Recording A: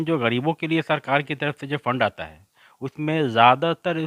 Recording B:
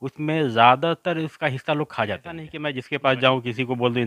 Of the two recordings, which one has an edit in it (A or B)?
B